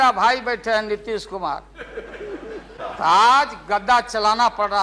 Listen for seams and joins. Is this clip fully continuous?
no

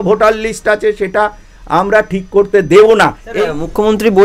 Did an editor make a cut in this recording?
yes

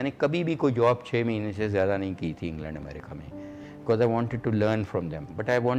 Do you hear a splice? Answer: no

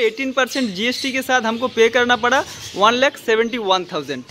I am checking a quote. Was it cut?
no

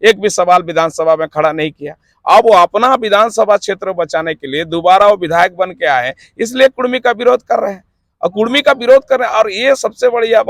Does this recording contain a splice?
no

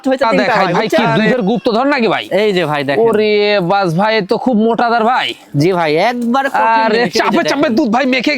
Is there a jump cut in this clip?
yes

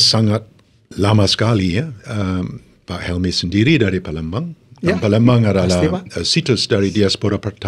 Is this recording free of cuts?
yes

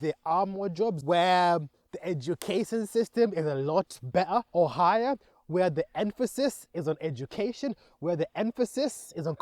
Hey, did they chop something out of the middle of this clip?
yes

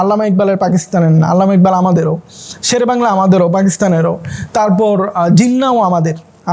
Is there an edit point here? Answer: no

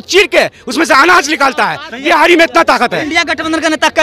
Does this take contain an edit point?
yes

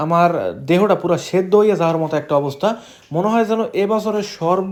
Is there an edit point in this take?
no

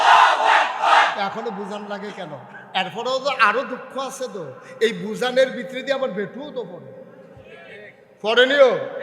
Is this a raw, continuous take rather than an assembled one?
no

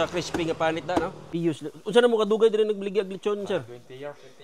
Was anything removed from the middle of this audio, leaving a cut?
yes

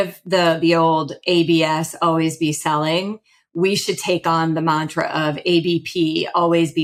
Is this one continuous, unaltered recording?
yes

